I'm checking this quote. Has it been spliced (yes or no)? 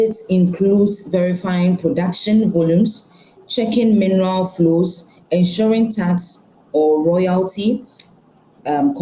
no